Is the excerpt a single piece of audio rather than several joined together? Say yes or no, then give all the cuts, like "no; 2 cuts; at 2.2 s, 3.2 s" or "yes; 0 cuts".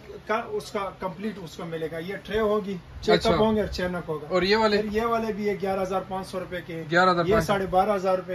yes; 0 cuts